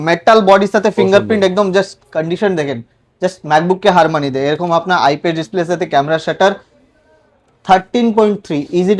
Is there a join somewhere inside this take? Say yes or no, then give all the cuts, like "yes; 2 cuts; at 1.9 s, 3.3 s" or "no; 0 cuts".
no; 0 cuts